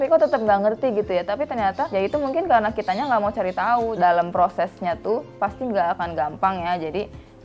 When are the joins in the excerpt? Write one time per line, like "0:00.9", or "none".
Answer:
0:01.9
0:03.9